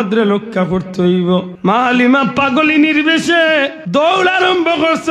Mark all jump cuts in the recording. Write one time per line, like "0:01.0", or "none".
0:01.5
0:03.8